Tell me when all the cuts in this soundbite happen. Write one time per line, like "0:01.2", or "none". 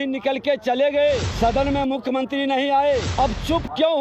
0:01.3
0:03.1